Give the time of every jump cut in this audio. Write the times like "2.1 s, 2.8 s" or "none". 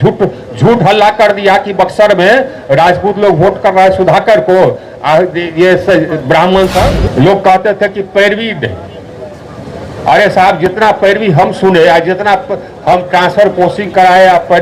6.9 s